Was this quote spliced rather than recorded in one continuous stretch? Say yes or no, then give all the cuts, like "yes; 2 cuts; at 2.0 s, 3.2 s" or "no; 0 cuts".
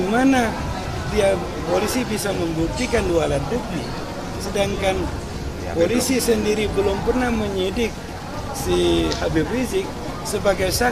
no; 0 cuts